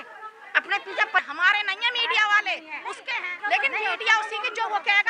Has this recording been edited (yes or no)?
yes